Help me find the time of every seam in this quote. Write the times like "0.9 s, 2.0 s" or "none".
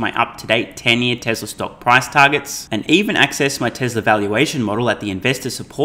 none